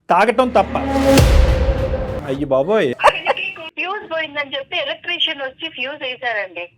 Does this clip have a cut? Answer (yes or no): yes